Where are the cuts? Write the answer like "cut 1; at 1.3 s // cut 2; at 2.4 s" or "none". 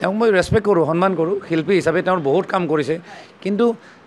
none